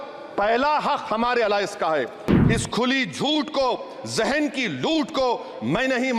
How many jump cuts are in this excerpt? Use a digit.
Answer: 1